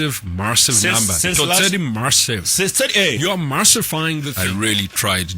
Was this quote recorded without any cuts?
no; 1 cut; at 4.3 s

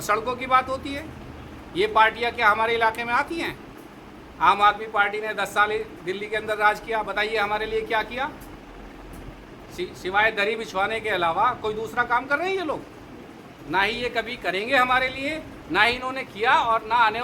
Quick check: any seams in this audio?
no; 0 cuts

